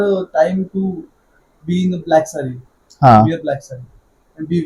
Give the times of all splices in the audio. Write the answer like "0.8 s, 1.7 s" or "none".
none